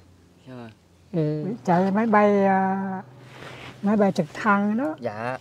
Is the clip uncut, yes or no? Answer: no